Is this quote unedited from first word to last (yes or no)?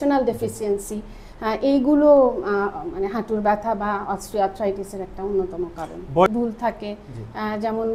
no